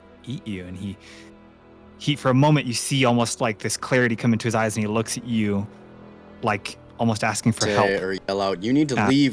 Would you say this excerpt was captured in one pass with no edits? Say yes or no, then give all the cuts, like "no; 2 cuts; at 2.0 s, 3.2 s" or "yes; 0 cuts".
no; 1 cut; at 7.6 s